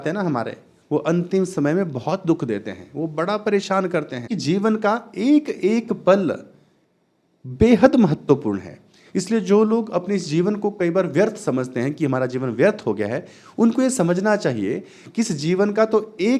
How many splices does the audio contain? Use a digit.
1